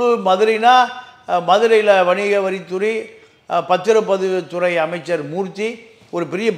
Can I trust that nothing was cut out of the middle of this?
yes; 0 cuts

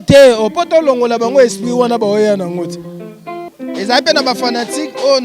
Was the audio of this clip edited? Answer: yes; 1 cut; at 3.5 s

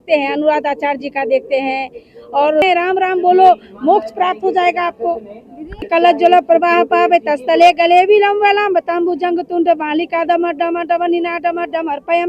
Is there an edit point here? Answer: yes; 2 cuts; at 2.6 s, 5.8 s

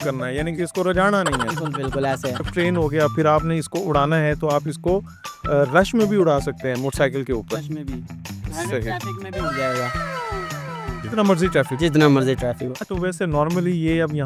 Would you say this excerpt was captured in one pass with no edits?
no; 2 cuts; at 2.5 s, 12.7 s

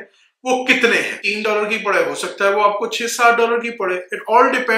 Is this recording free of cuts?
no; 1 cut; at 1.3 s

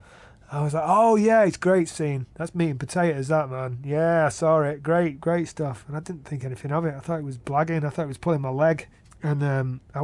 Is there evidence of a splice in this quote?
yes; 1 cut; at 8.9 s

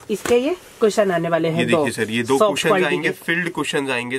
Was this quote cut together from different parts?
no; 0 cuts

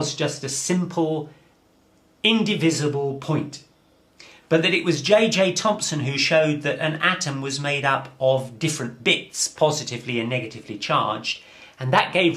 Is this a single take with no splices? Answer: no; 1 cut; at 5.3 s

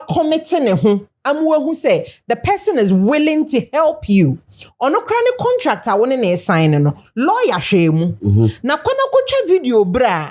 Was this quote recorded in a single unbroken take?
yes; 0 cuts

